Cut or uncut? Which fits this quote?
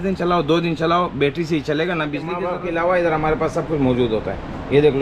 cut